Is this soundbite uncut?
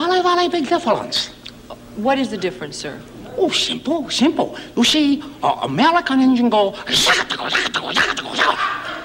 yes; 0 cuts

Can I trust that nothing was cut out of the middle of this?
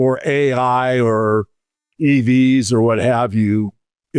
yes; 0 cuts

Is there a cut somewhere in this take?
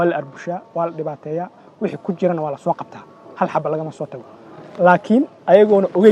no; 0 cuts

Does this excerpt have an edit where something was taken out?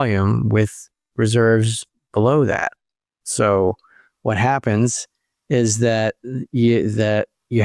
no; 0 cuts

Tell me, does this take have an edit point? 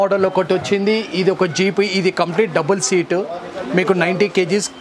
no; 0 cuts

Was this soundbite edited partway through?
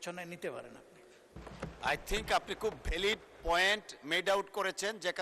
yes; 1 cut; at 1.4 s

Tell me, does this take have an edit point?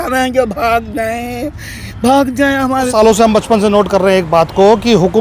yes; 1 cut; at 2.9 s

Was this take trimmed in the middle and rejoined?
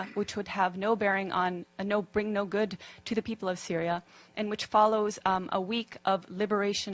no; 0 cuts

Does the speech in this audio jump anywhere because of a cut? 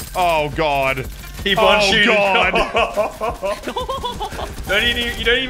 no; 0 cuts

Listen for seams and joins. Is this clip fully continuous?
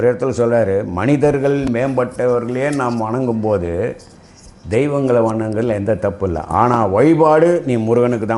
yes; 0 cuts

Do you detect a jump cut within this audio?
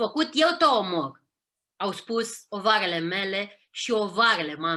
no; 0 cuts

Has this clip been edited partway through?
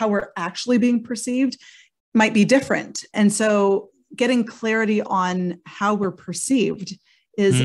yes; 1 cut; at 5.1 s

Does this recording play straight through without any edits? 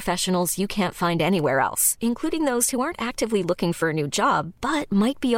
yes; 0 cuts

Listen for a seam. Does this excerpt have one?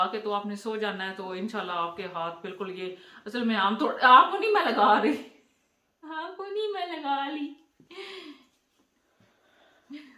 no; 0 cuts

